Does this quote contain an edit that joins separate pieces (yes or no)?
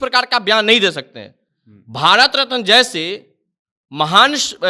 no